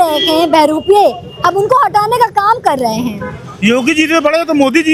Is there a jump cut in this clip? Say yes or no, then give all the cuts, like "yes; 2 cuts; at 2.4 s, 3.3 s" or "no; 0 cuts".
no; 0 cuts